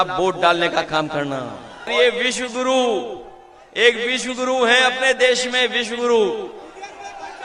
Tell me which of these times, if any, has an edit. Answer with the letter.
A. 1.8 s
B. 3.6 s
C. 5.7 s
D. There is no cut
A